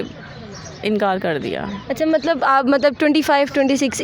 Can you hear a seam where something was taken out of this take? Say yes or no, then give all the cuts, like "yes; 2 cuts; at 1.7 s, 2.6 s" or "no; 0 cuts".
no; 0 cuts